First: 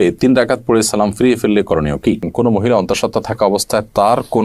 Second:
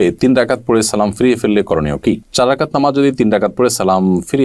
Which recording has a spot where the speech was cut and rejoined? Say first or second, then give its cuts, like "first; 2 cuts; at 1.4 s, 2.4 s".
first; 1 cut; at 2.3 s